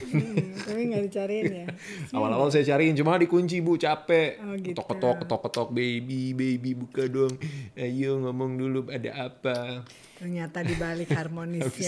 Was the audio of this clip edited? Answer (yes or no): no